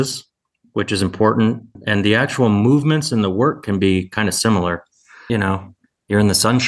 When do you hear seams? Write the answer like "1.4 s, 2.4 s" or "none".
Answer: 1.8 s, 5.2 s